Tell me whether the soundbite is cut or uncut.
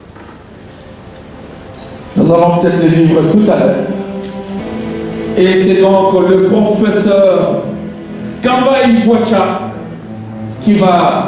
uncut